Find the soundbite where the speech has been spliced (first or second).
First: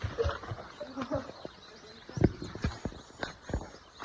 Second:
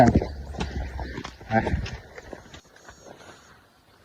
second